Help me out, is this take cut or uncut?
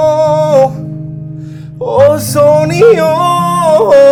uncut